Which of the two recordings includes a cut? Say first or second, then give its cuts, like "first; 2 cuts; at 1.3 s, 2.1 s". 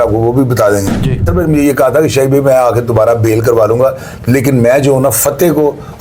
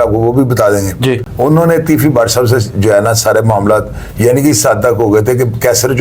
first; 1 cut; at 1.3 s